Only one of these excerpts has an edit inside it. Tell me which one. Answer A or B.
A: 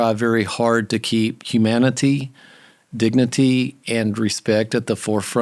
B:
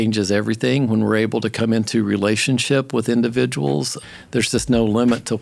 B